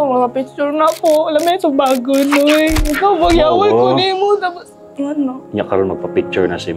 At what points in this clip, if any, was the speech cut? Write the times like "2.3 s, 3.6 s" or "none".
none